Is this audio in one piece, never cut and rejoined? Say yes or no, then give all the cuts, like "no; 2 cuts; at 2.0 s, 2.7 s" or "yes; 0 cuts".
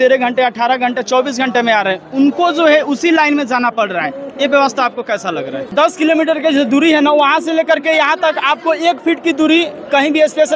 no; 1 cut; at 5.7 s